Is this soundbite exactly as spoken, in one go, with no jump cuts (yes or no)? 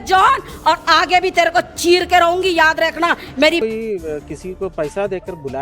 no